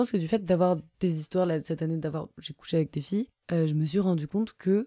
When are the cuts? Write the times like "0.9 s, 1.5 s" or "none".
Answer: 2.4 s, 3.4 s